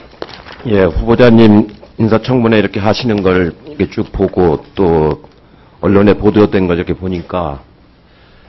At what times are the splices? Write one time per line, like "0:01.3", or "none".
none